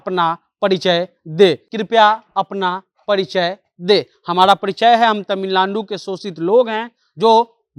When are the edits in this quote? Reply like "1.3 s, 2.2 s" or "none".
1.7 s